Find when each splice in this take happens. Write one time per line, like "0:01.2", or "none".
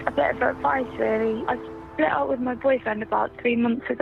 0:01.5